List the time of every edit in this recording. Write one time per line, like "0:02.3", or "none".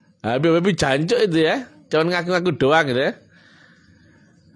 none